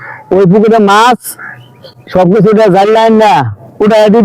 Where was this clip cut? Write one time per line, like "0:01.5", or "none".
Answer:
none